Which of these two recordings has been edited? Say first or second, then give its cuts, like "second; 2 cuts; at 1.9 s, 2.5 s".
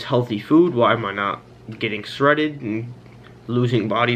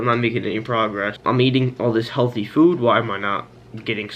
second; 1 cut; at 1.1 s